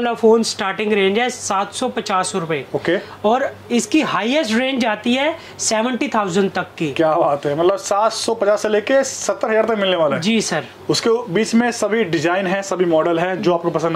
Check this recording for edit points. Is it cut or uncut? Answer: uncut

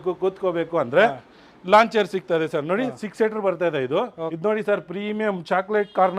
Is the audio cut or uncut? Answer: cut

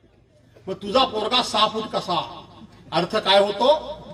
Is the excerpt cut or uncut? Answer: uncut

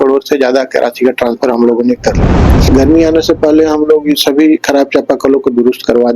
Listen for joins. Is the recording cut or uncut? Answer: cut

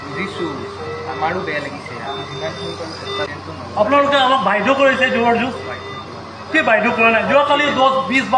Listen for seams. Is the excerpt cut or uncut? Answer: cut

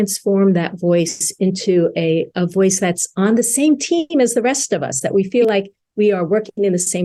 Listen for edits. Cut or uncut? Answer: uncut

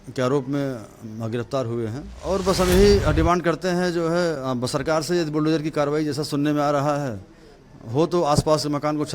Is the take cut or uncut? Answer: cut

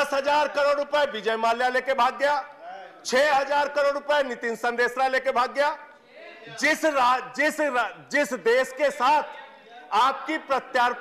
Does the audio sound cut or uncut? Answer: uncut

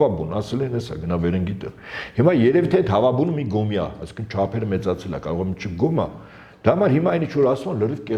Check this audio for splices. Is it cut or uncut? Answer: uncut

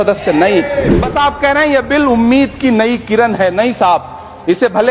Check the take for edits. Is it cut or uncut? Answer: cut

